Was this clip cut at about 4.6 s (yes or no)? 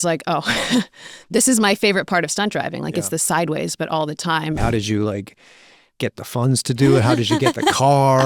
yes